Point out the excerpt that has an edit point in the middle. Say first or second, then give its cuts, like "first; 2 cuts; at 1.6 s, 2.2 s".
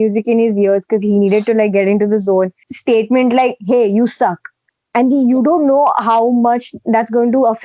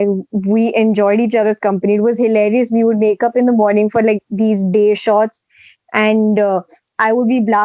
first; 1 cut; at 2.7 s